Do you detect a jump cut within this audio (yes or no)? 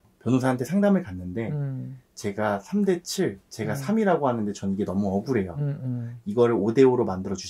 no